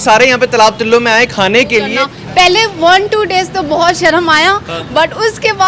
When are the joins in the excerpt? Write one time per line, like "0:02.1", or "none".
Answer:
0:02.0

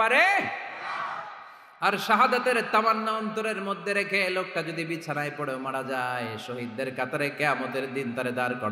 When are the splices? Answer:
none

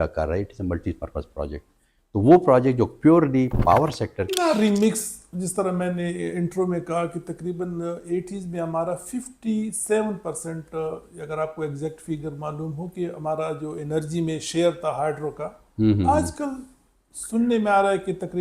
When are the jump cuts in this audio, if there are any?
0:04.3

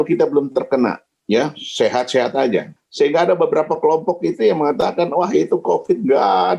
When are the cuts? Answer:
0:01.1
0:02.8

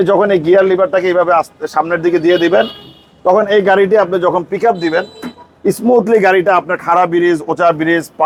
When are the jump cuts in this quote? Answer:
none

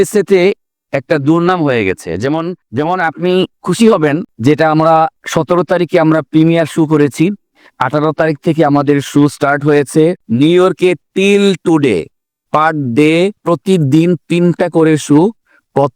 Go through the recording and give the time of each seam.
0:02.6
0:13.4

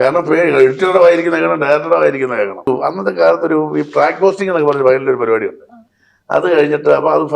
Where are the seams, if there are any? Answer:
0:02.7

